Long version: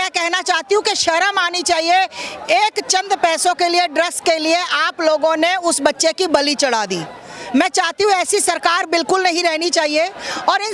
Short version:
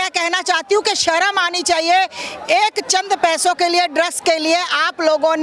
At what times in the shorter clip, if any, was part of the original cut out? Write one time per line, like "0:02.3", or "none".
none

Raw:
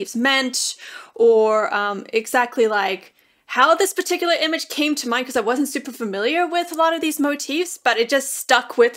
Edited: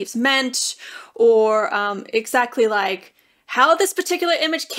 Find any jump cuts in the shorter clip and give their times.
none

